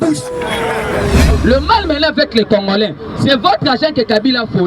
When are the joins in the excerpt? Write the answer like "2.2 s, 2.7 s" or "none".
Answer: 1.3 s